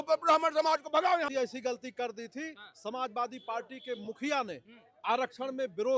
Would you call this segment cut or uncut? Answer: cut